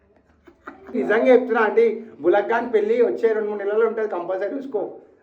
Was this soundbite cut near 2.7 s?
no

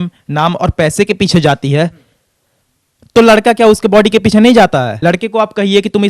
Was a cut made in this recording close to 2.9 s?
no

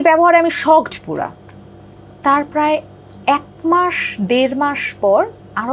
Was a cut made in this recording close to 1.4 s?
no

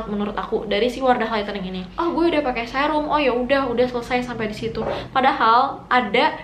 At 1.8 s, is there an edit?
yes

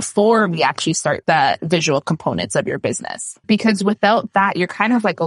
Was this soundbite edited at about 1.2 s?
yes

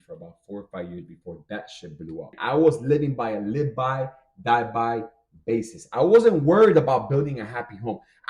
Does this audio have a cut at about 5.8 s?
no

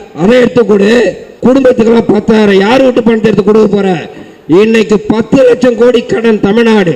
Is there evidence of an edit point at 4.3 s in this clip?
no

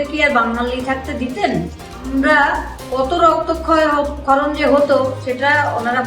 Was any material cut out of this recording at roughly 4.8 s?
no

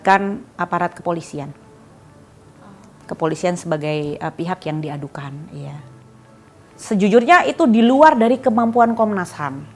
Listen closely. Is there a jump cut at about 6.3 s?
yes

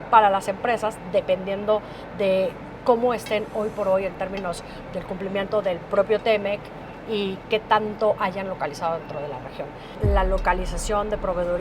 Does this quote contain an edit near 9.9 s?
yes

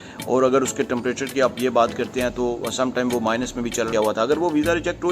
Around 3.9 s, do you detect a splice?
yes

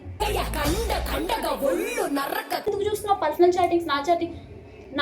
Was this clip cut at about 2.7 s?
yes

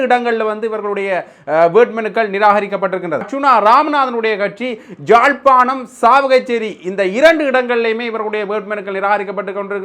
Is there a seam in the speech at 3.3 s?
yes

